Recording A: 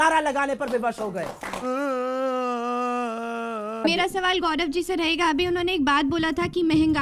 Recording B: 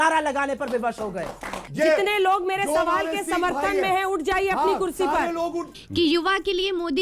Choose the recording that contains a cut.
B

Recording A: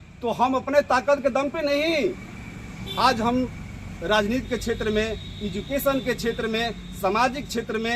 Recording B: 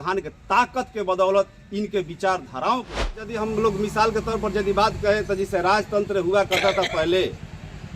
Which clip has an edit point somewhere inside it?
B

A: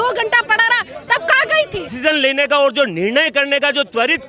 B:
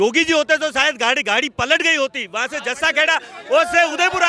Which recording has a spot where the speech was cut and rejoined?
A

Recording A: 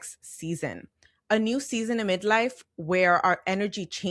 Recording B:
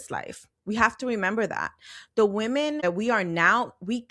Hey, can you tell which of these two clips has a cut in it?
B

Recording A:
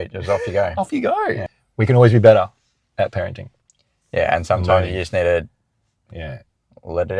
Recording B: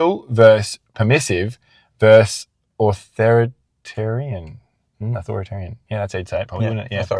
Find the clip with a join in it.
A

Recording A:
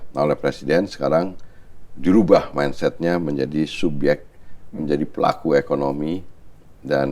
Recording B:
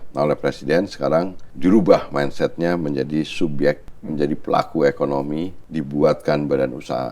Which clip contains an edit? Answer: B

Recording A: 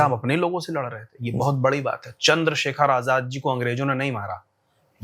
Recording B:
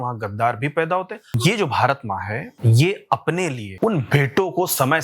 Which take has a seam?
B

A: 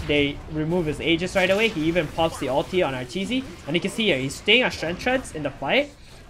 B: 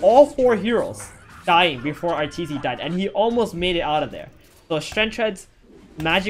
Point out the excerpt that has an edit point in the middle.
A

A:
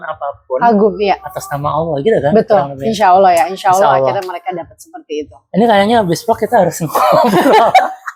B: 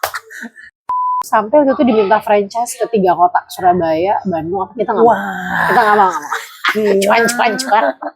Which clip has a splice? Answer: B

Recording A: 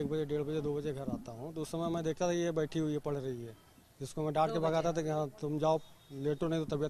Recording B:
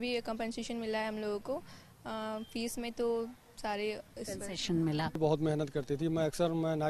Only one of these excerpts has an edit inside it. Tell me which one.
B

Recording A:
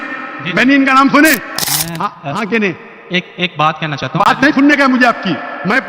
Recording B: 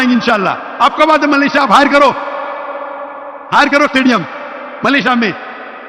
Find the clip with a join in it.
A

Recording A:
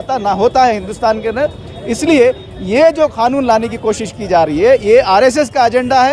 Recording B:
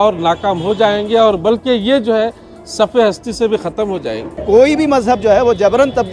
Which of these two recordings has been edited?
B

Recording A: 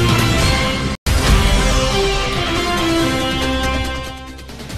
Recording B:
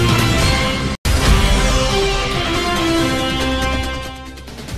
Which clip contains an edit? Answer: A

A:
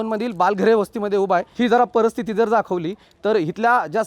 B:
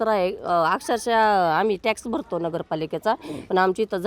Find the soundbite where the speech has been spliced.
A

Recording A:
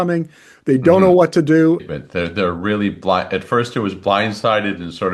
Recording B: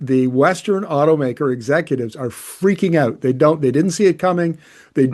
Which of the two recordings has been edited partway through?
A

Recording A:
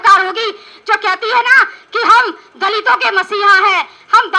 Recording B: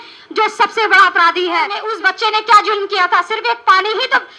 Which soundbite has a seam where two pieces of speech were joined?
B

